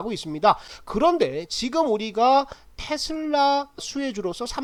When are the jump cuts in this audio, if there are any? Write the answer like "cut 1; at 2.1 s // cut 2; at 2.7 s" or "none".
none